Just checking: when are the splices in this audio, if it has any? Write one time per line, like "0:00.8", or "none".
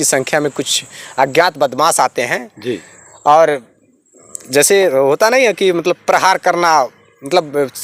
none